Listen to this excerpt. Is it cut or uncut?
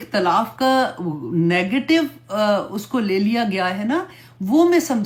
uncut